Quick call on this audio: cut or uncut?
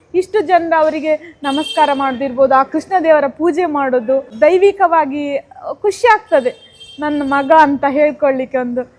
cut